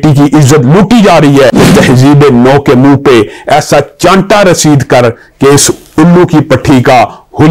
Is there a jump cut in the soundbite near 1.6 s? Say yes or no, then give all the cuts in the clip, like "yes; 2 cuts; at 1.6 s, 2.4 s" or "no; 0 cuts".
yes; 1 cut; at 1.6 s